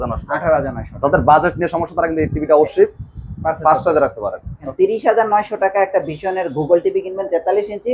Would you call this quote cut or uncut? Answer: cut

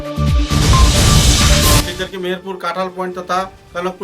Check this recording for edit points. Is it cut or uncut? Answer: cut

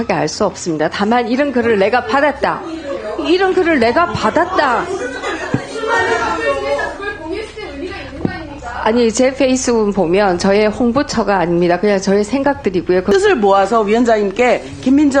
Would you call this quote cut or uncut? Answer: cut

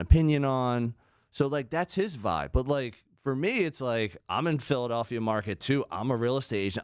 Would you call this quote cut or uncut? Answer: uncut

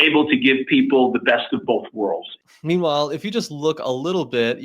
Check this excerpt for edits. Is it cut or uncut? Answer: cut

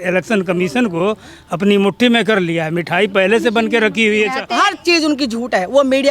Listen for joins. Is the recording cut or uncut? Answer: cut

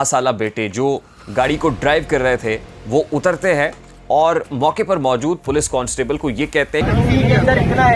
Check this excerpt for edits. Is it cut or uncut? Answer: cut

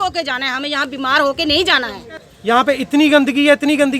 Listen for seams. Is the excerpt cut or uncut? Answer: cut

